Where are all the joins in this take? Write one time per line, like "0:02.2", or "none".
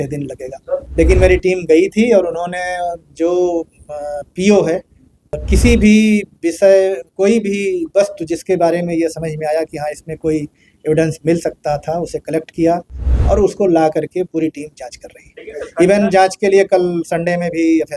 0:00.9
0:05.4